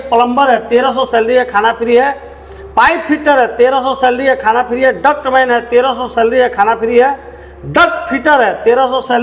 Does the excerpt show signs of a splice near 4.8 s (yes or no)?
no